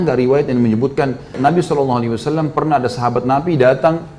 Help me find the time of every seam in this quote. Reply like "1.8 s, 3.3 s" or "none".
1.4 s